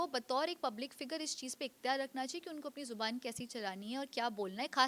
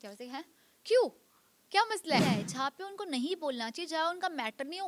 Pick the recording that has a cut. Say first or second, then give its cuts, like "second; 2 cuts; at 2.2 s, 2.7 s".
second; 1 cut; at 2.2 s